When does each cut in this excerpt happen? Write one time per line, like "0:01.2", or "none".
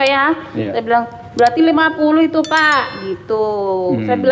none